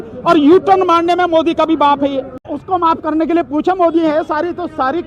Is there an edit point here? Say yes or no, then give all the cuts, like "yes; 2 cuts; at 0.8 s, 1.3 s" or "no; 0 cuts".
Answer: yes; 1 cut; at 2.4 s